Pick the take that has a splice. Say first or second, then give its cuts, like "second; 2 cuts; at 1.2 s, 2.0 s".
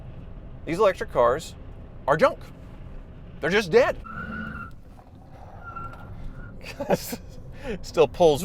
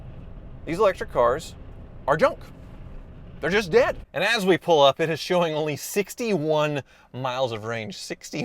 second; 1 cut; at 4.0 s